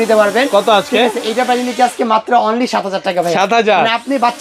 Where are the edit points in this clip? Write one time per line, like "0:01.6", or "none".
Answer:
none

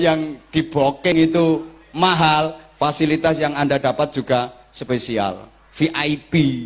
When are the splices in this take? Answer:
0:01.1

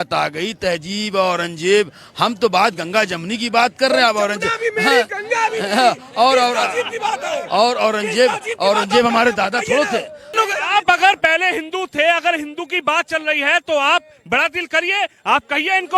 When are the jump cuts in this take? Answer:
0:10.4

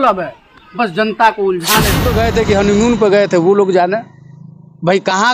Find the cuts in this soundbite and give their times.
0:02.0

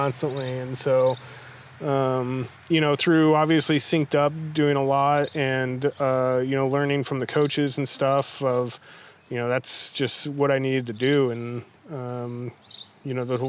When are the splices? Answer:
none

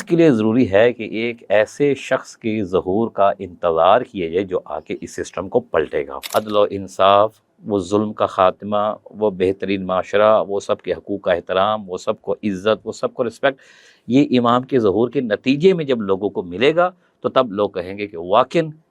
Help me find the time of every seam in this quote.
0:06.2

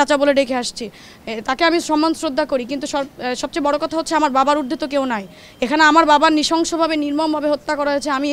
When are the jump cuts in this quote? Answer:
none

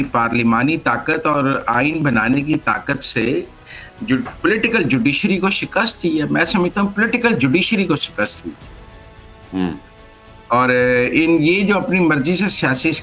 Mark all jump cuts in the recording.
none

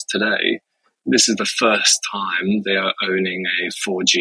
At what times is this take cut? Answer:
none

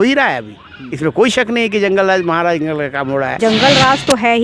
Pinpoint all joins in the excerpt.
0:03.4

